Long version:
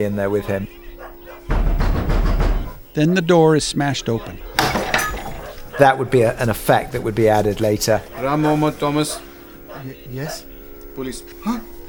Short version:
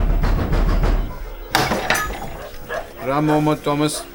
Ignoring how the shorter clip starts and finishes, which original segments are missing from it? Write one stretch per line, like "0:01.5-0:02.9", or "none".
0:02.8-0:04.3
0:05.8-0:07.9